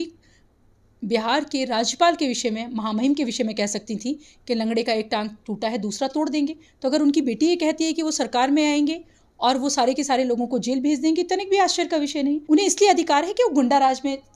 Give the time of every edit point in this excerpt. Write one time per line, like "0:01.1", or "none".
0:12.4